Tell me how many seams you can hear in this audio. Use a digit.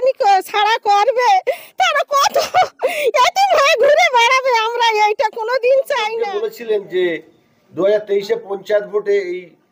1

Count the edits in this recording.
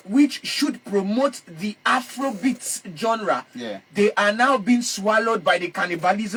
0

